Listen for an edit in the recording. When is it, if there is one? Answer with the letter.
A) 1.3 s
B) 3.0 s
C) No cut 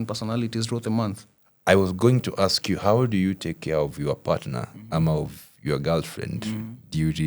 A